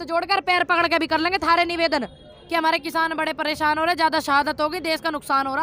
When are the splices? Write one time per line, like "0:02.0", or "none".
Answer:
none